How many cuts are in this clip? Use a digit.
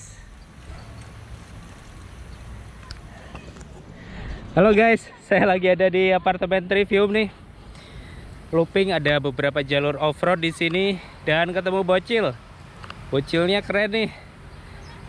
1